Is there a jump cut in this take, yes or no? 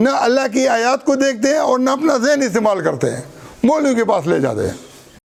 no